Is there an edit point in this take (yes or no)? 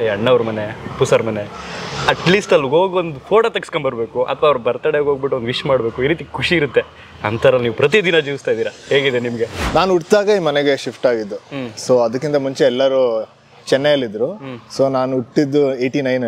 yes